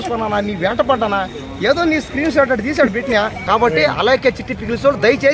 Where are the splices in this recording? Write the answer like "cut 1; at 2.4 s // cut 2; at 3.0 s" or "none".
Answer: cut 1; at 3.4 s